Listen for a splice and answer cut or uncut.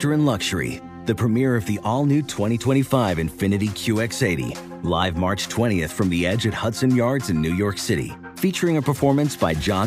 uncut